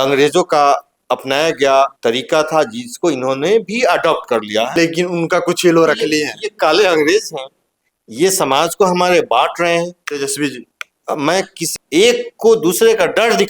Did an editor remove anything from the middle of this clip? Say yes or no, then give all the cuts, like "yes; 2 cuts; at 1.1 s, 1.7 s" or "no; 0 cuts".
yes; 4 cuts; at 0.9 s, 1.9 s, 4.7 s, 11.6 s